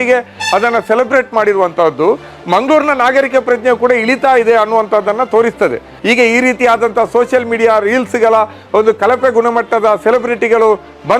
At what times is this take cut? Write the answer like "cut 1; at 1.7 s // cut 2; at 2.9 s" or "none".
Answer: cut 1; at 5.9 s